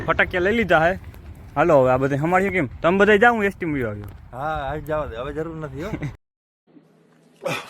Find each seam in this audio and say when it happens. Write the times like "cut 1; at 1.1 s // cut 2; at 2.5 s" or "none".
cut 1; at 6.2 s